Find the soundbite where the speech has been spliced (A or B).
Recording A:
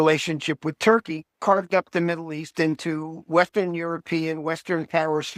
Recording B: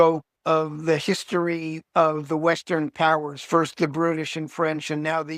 B